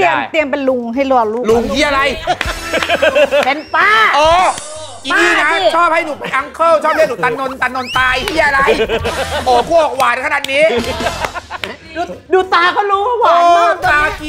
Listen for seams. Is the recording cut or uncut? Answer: uncut